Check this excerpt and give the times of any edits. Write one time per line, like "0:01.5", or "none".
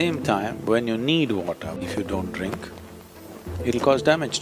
0:01.8